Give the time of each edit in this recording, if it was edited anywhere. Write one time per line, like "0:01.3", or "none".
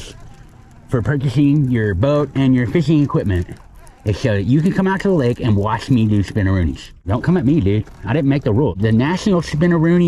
0:07.0
0:08.8